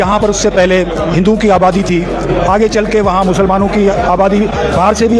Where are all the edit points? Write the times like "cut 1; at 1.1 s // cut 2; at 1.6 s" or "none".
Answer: none